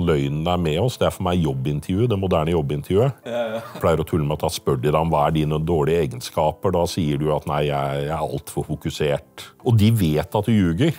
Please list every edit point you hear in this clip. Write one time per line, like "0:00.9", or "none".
0:03.8
0:09.4